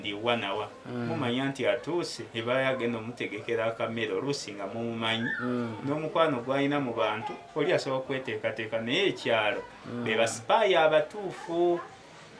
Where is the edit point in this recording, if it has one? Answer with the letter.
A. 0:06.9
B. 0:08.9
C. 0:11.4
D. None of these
D